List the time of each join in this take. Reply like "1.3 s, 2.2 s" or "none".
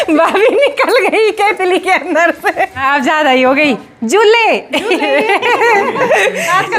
2.8 s